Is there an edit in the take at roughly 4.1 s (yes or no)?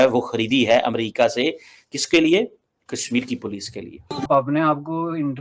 yes